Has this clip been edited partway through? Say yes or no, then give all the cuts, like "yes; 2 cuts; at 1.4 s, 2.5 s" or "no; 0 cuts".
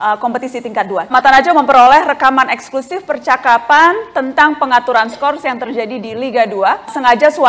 no; 0 cuts